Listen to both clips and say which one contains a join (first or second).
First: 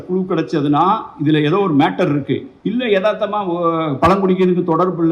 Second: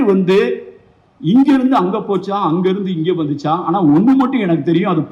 first